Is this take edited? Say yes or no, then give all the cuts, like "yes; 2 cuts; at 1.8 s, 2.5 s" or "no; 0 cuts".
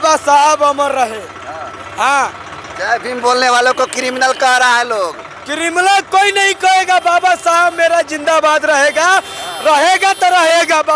no; 0 cuts